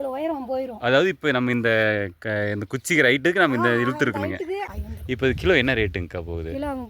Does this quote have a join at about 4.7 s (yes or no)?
yes